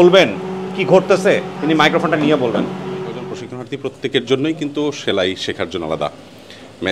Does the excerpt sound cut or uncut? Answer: cut